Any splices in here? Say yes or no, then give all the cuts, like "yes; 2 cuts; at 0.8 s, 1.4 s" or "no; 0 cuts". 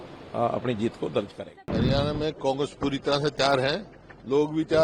yes; 1 cut; at 1.4 s